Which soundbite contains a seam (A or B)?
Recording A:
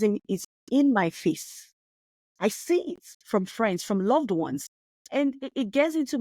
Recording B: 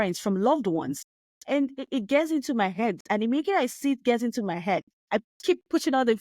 B